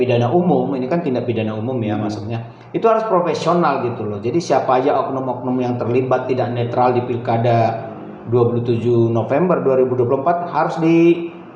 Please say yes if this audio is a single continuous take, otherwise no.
yes